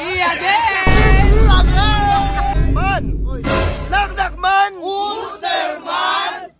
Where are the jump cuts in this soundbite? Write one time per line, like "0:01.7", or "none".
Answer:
0:02.5